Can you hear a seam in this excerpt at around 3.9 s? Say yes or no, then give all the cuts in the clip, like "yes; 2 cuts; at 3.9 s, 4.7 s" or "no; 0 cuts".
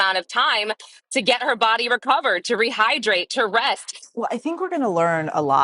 yes; 1 cut; at 3.9 s